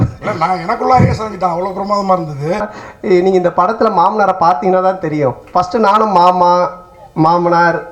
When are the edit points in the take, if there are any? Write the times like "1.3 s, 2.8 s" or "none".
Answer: 2.7 s